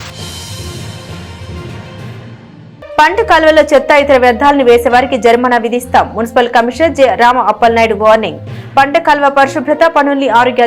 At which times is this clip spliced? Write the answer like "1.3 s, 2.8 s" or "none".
2.6 s

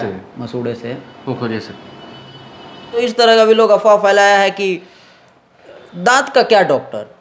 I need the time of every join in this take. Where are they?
3.0 s

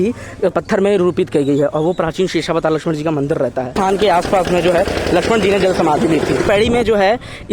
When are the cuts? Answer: 3.7 s, 6.5 s

